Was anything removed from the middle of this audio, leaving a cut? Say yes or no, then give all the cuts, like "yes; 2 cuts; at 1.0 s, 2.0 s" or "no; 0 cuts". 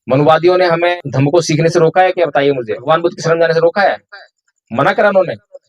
yes; 2 cuts; at 0.9 s, 2.8 s